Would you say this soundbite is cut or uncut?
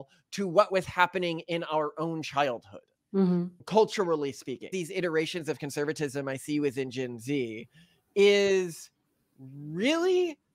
cut